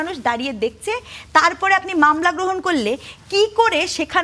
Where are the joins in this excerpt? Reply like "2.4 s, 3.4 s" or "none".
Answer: none

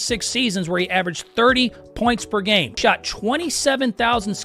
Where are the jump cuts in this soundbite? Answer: 2.8 s

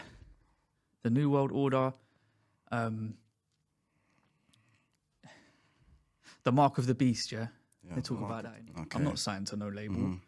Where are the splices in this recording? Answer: 8.5 s

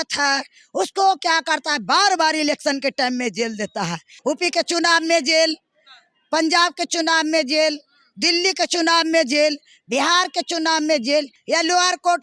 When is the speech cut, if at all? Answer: 4.1 s, 11.4 s

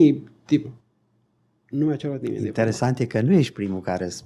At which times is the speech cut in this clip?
none

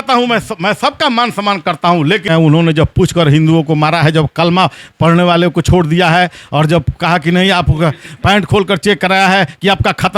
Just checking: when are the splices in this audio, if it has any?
2.2 s

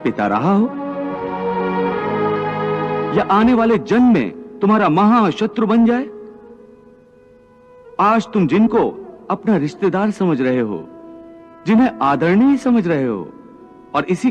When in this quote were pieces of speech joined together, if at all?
none

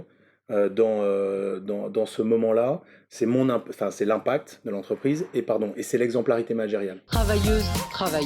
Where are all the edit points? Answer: 7.0 s

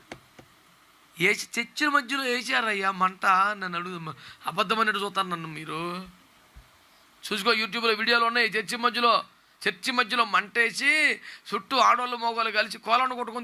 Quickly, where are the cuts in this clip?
none

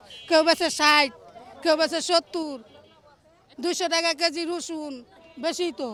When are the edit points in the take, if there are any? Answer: none

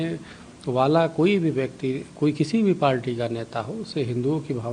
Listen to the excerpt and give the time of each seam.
none

